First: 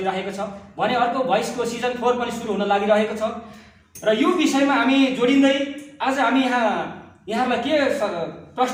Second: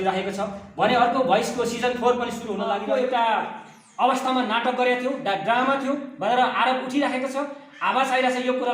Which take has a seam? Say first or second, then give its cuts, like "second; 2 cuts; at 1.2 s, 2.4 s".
second; 1 cut; at 2.7 s